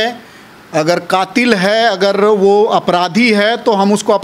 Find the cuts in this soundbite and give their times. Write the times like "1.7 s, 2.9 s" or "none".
none